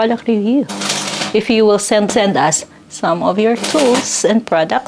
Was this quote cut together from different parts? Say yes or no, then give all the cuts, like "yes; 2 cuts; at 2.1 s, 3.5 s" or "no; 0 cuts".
yes; 1 cut; at 2.1 s